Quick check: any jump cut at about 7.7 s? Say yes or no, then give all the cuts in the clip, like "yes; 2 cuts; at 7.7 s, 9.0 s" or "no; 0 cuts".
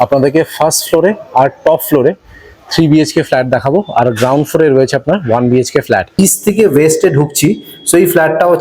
no; 1 cut; at 6.1 s